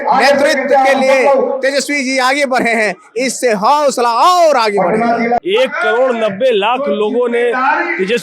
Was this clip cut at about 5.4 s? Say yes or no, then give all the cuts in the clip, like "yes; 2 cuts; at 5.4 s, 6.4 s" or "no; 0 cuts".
yes; 1 cut; at 5.4 s